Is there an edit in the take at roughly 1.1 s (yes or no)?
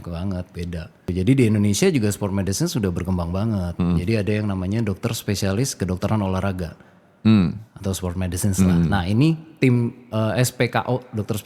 yes